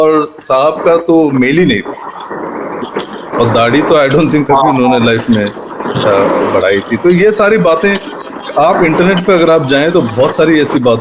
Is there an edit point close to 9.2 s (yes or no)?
no